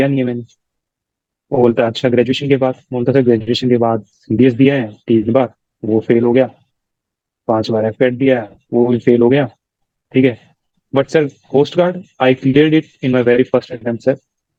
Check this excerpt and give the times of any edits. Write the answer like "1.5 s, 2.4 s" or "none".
none